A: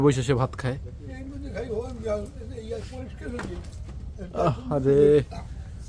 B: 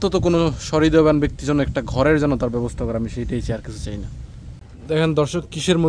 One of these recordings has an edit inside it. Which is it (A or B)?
B